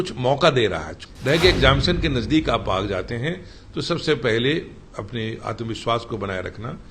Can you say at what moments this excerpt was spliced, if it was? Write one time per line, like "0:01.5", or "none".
0:00.9

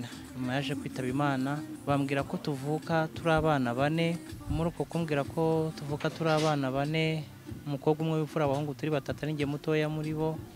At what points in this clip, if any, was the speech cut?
0:01.7
0:04.3

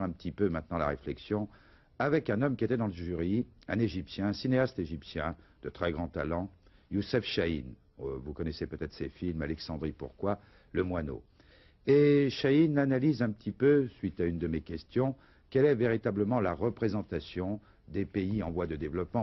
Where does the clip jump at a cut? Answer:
none

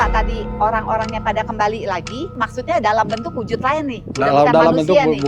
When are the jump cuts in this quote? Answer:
0:02.3

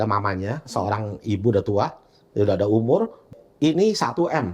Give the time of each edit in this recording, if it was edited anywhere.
0:03.3

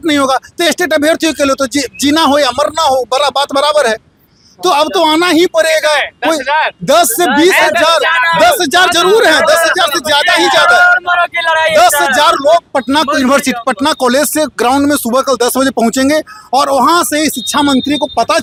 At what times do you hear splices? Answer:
none

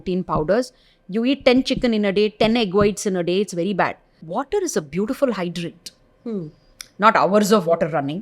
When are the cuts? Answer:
0:04.2

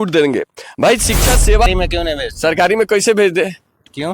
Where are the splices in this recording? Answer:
0:01.7

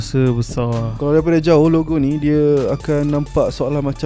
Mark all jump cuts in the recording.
0:00.9

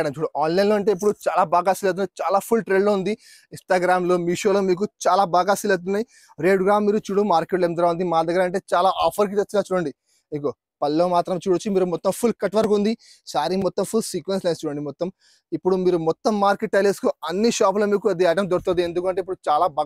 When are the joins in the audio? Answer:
none

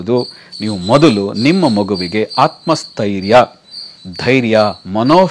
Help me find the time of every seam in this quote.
none

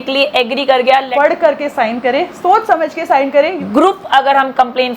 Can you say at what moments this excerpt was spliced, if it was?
0:01.1
0:03.6

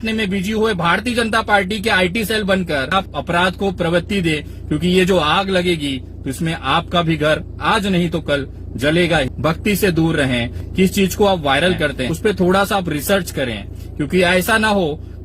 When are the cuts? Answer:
0:02.9
0:09.3
0:10.6
0:12.1

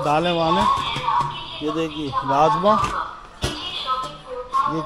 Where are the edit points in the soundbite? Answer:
none

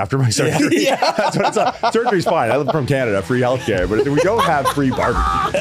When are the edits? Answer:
none

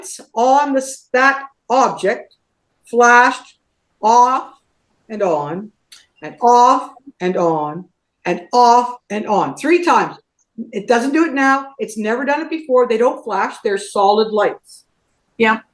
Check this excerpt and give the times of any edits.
none

